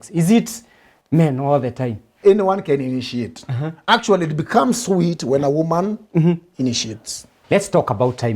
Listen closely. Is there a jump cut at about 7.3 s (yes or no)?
yes